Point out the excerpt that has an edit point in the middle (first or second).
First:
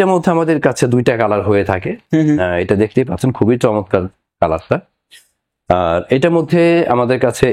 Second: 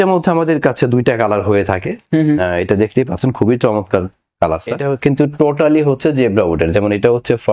second